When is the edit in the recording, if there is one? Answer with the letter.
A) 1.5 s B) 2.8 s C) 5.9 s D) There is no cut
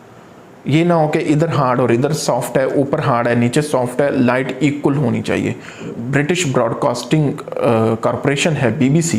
C